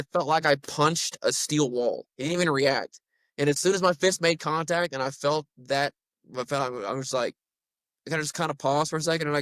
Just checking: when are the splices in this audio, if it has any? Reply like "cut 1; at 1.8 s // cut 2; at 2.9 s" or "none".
cut 1; at 2.1 s